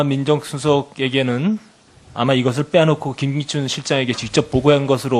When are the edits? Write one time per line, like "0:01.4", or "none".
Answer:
none

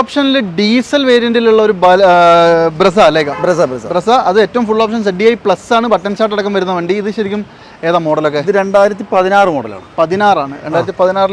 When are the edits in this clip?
none

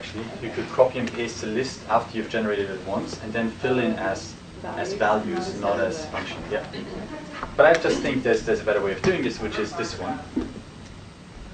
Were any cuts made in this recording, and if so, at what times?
none

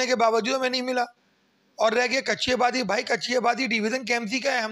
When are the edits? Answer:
none

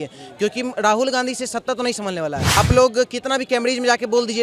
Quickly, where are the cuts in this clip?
0:02.5

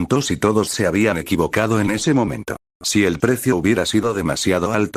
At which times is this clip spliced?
0:02.6

